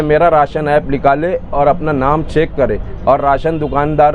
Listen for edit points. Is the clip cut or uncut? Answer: uncut